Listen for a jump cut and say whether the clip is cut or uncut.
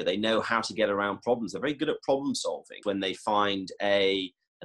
cut